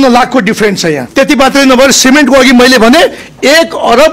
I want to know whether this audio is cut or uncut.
cut